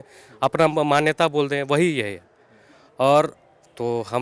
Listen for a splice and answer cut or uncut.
uncut